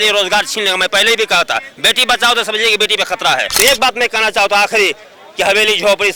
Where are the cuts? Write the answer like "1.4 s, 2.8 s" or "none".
3.5 s